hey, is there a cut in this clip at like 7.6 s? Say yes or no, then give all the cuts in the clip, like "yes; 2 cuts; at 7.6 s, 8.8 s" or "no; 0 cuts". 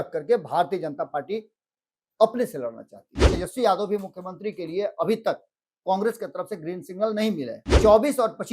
yes; 2 cuts; at 3.3 s, 7.6 s